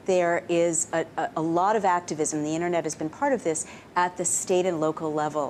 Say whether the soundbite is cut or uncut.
uncut